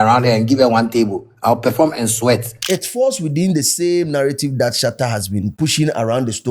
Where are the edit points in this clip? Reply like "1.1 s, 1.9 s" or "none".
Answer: 2.6 s, 5.5 s

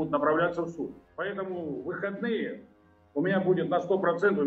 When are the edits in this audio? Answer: 1.0 s

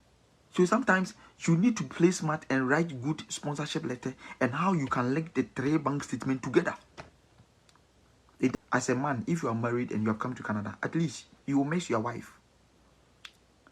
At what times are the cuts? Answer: 8.5 s

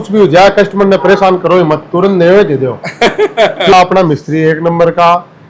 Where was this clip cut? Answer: 3.7 s

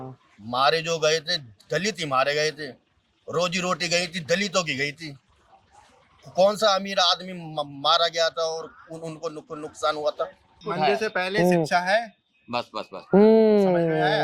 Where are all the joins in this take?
10.6 s

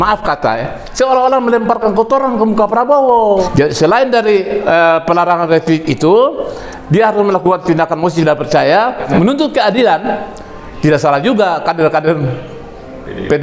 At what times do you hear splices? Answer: 3.4 s, 9.1 s

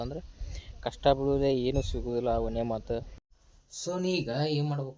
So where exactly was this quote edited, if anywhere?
3.2 s

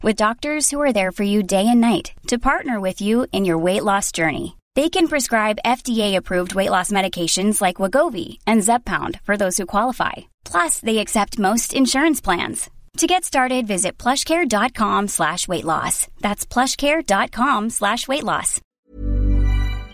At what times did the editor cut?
18.7 s

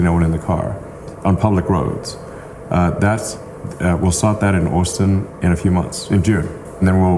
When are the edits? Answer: none

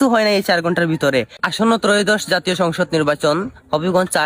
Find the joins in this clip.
1.5 s

